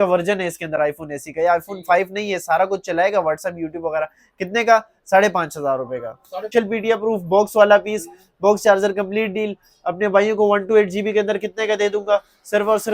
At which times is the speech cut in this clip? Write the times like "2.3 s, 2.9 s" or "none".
6.5 s